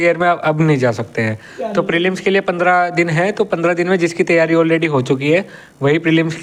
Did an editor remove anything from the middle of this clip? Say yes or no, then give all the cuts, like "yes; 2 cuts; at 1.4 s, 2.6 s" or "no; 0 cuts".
no; 0 cuts